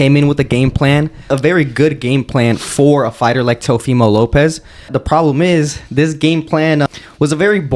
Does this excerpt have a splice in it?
yes; 3 cuts; at 1.3 s, 4.9 s, 6.8 s

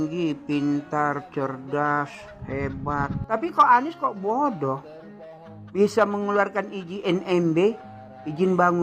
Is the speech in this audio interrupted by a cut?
yes; 1 cut; at 3.2 s

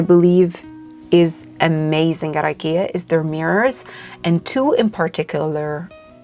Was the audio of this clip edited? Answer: no; 0 cuts

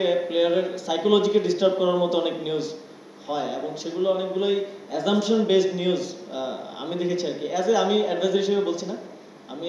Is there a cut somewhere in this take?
no; 0 cuts

